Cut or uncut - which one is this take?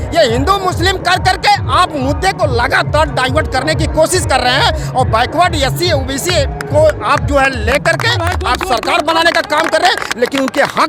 uncut